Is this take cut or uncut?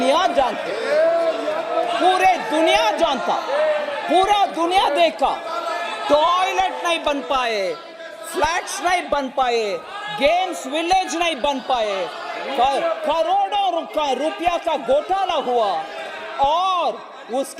uncut